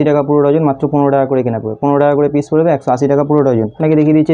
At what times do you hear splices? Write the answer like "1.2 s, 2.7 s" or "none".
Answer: none